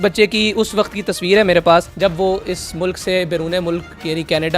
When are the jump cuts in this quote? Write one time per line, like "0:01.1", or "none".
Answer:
0:01.9